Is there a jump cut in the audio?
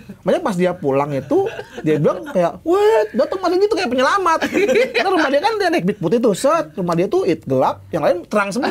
no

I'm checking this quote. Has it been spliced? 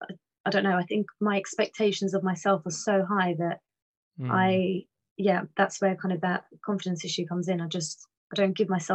no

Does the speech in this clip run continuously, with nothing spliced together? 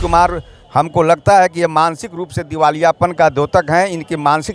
yes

